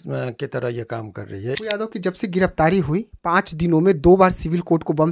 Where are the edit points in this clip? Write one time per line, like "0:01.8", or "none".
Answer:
0:01.6